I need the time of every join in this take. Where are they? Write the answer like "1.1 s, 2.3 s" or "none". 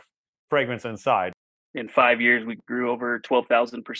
1.4 s